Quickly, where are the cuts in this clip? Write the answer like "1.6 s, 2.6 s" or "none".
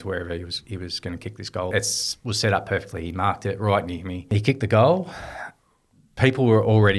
1.7 s, 4.3 s